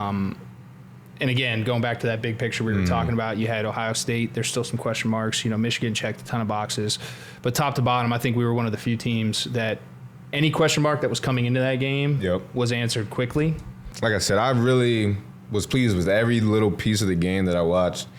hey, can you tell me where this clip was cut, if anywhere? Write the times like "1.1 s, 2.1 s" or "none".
13.9 s